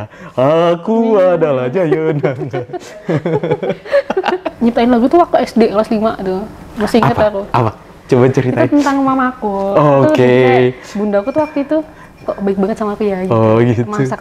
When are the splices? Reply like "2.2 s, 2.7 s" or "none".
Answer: 4.5 s